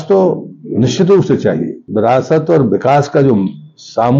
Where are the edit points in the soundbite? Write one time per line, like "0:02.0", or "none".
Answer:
0:01.8